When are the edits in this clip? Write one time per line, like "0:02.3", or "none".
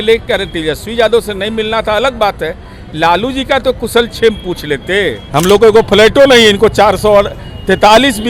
0:05.2